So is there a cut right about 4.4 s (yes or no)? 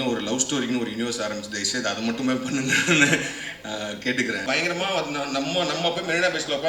yes